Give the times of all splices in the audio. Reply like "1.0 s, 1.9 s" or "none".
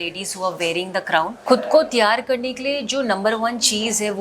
1.4 s

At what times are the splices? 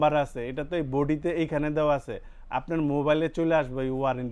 none

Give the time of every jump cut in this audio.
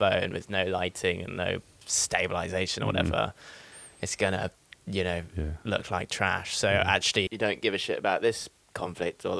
7.3 s

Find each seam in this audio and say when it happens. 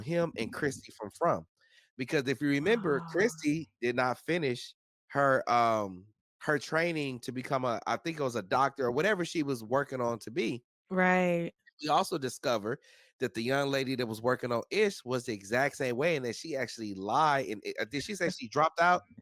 none

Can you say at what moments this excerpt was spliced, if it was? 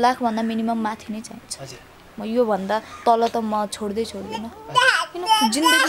none

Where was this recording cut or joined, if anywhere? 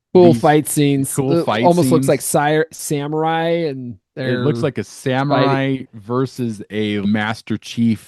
7.0 s

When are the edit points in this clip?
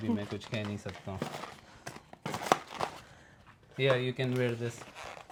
none

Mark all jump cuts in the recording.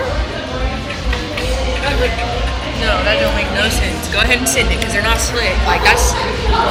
none

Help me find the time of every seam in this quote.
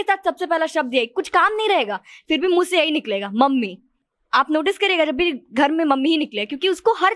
none

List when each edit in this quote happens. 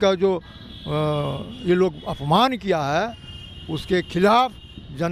none

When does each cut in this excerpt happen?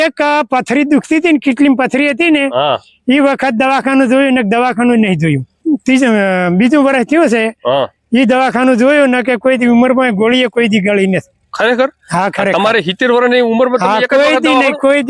5.5 s

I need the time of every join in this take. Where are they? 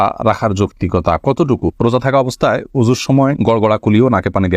1.8 s

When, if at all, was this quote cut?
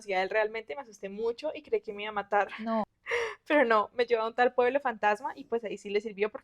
3.0 s

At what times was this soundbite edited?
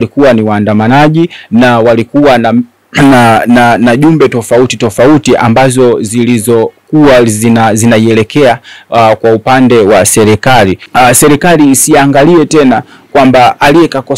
10.8 s

